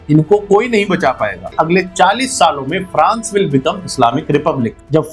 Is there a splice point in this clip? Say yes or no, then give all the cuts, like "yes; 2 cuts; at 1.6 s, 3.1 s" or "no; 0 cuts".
yes; 1 cut; at 1.5 s